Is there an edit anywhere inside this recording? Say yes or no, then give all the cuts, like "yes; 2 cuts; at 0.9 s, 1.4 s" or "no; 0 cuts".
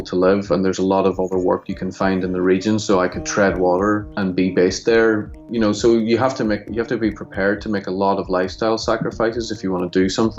yes; 2 cuts; at 4.1 s, 5.3 s